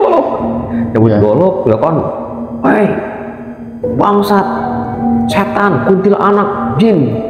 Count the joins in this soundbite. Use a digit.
0